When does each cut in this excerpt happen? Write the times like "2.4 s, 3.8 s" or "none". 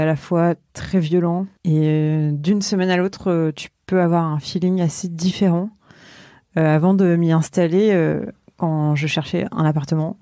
1.5 s